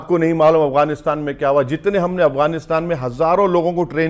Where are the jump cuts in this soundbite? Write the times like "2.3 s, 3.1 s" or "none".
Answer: none